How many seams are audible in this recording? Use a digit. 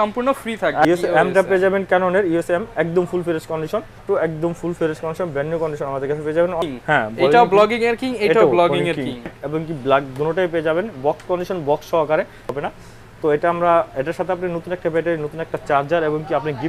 5